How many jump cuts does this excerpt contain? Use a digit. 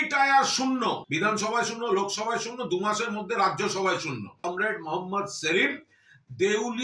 2